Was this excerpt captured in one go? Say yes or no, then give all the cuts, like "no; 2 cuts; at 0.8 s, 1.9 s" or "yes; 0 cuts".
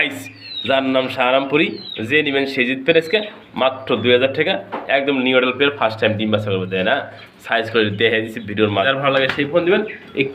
no; 1 cut; at 8.9 s